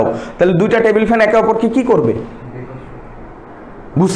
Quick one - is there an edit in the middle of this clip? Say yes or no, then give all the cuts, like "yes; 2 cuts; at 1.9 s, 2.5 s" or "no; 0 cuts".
no; 0 cuts